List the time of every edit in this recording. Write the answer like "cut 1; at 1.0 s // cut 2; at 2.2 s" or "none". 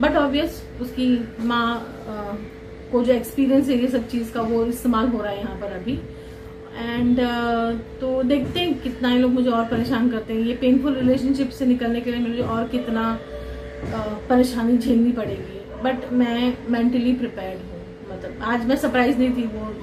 none